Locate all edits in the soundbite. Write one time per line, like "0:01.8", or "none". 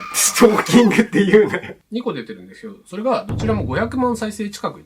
0:01.8